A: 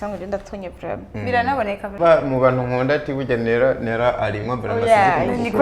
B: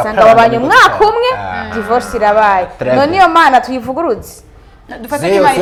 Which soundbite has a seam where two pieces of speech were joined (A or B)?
A